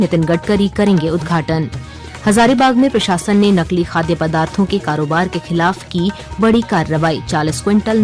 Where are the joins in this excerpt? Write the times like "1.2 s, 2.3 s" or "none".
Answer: none